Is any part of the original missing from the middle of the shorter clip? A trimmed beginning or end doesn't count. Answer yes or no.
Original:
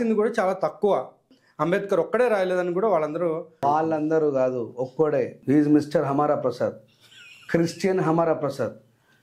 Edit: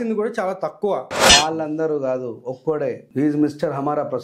yes